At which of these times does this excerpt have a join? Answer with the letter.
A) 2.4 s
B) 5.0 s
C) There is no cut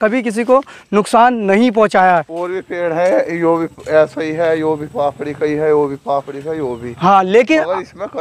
A